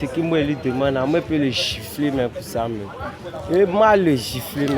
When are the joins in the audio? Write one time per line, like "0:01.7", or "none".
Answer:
0:02.3